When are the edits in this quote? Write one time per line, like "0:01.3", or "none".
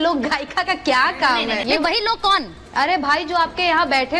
0:01.6

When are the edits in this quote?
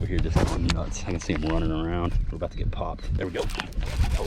0:03.2

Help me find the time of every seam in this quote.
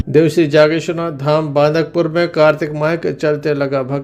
none

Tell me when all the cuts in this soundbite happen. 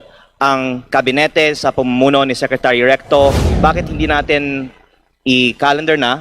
0:03.5

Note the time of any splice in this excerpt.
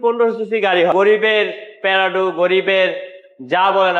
0:00.9

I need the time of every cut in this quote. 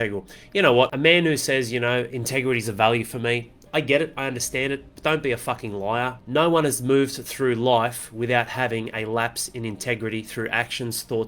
0:00.9

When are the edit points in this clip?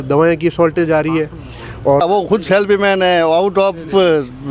0:02.1

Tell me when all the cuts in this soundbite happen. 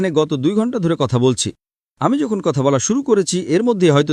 none

